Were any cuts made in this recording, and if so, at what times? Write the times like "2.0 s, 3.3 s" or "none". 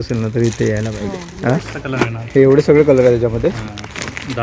1.7 s